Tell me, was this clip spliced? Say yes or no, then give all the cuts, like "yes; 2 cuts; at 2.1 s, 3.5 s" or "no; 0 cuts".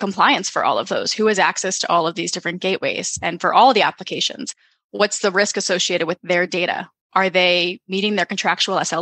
no; 0 cuts